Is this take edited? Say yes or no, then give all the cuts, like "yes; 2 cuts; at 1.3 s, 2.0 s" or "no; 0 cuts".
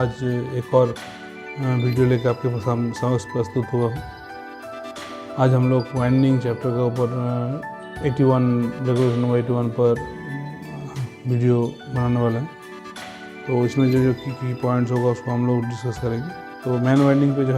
yes; 2 cuts; at 4.0 s, 5.4 s